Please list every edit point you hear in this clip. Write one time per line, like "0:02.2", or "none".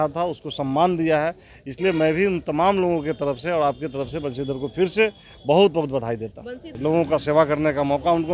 0:06.7